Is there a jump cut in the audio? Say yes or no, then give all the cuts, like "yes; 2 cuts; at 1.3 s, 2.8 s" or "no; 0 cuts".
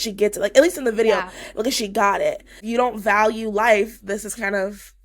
yes; 1 cut; at 2.6 s